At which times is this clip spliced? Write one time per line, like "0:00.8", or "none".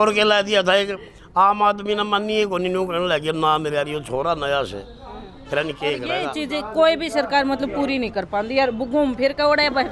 0:06.3